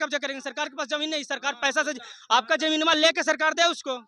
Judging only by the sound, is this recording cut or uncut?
uncut